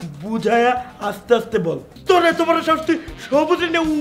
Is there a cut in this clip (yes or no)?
yes